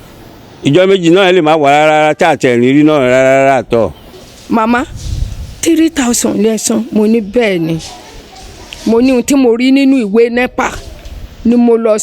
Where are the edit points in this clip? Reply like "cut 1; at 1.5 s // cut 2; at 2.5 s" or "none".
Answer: cut 1; at 4.0 s